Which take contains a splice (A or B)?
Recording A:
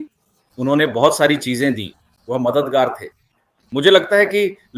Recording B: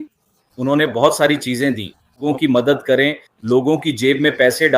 B